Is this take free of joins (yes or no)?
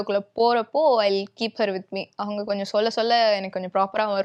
yes